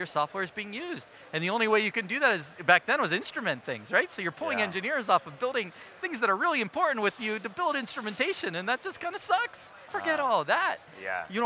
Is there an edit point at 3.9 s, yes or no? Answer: no